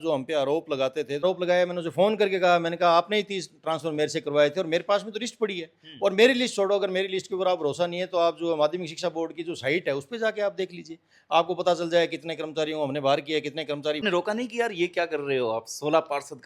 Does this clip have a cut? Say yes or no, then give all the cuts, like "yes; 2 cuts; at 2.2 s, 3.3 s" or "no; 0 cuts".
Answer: yes; 2 cuts; at 1.2 s, 14.0 s